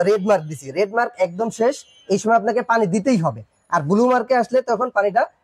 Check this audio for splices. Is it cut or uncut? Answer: uncut